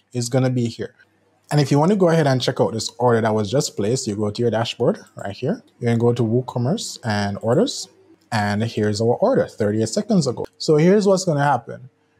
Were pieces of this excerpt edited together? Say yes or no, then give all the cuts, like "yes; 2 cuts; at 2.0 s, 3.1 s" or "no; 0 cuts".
yes; 1 cut; at 10.5 s